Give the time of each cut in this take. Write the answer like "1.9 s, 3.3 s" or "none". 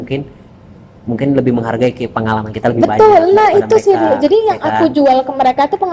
none